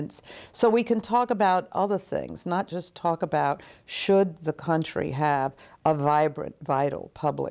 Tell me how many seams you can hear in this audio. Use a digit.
0